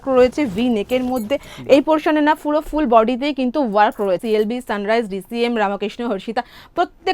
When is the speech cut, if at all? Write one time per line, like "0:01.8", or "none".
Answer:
0:04.2